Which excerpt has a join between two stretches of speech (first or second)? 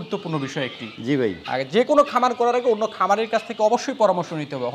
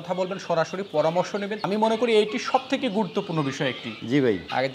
second